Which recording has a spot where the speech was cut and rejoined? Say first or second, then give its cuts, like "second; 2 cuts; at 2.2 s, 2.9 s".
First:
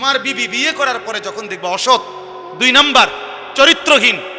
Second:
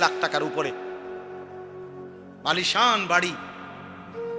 second; 1 cut; at 3.5 s